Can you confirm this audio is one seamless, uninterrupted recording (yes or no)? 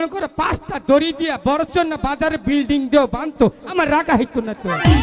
yes